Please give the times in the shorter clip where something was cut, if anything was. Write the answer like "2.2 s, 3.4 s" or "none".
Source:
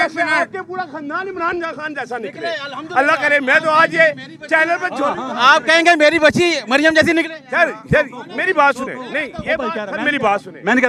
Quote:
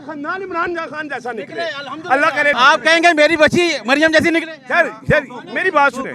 2.5 s

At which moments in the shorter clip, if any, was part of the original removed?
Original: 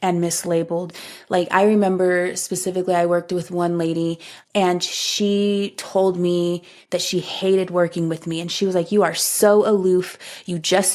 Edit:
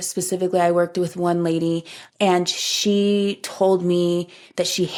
none

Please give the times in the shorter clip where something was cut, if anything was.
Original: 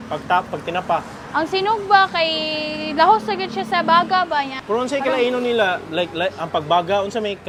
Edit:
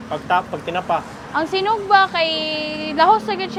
none

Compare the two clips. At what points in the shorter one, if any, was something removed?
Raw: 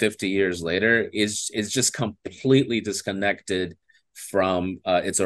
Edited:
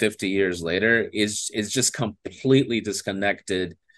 none

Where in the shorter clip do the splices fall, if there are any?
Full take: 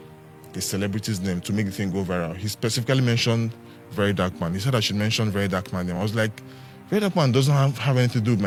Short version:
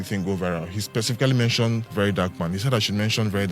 1.9 s

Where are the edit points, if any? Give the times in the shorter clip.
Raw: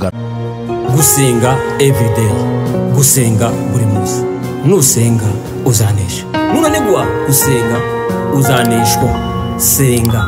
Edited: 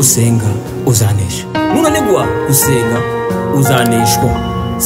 none

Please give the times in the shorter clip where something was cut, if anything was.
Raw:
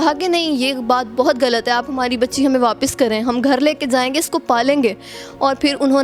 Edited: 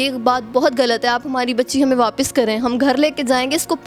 none

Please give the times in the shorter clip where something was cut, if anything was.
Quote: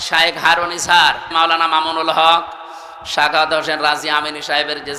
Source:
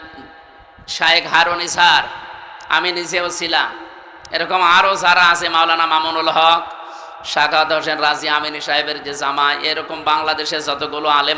1.3 s

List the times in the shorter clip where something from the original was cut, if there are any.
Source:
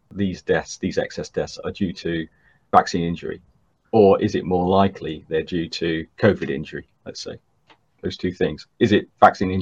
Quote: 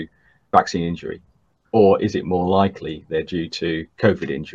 none

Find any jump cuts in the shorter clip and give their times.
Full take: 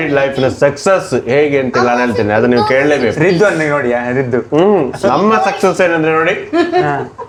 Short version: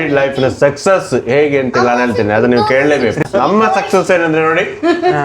3.2 s

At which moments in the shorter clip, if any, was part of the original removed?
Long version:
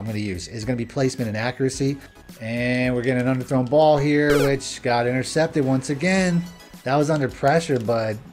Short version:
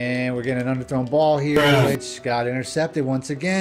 none

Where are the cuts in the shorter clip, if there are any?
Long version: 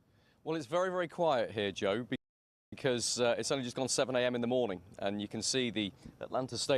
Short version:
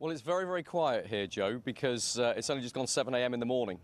1.7 s

